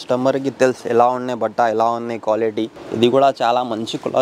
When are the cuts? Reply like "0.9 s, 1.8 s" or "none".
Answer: 2.8 s

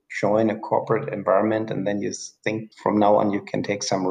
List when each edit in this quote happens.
2.7 s

